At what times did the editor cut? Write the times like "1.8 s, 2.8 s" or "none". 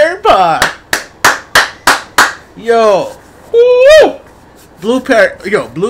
none